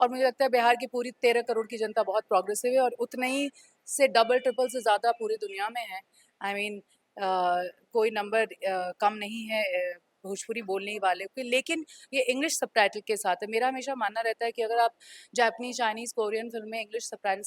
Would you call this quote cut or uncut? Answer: uncut